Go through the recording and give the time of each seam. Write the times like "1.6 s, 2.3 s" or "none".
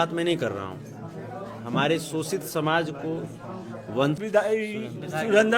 4.2 s